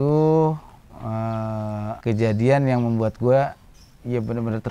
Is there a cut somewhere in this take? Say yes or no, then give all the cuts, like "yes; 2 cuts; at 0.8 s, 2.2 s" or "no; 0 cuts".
yes; 1 cut; at 2.0 s